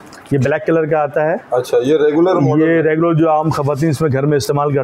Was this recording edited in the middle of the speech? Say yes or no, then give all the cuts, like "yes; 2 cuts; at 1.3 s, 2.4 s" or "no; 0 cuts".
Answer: no; 0 cuts